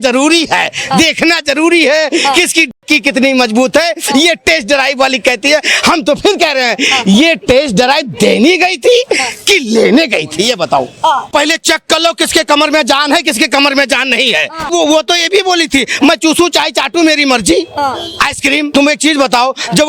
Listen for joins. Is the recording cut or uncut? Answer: cut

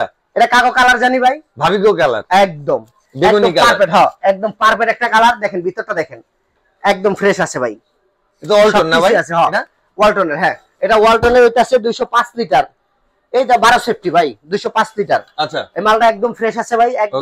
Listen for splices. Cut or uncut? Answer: uncut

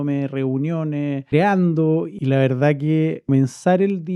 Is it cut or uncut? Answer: cut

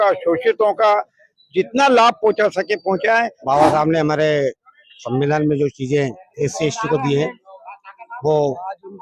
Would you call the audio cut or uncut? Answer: cut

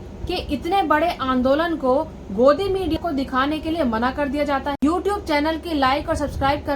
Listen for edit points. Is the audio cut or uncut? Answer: cut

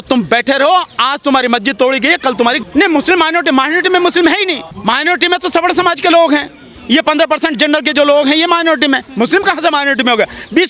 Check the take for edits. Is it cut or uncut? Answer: cut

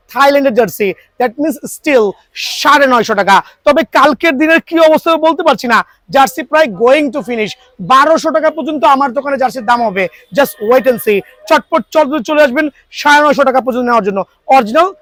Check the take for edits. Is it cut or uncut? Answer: uncut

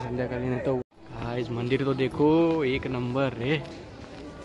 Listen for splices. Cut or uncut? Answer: cut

